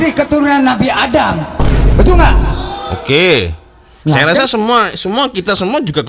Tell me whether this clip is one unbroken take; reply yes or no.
yes